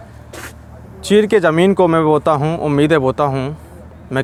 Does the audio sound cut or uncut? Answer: uncut